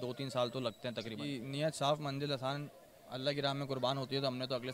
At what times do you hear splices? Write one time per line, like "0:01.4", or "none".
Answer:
0:01.2